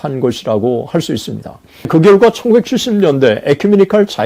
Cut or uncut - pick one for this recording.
cut